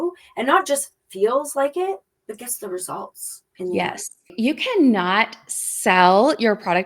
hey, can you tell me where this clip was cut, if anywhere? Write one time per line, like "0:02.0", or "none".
0:02.1
0:04.3